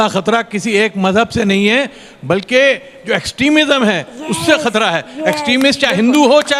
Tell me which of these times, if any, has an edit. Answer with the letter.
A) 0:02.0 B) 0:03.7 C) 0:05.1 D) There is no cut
D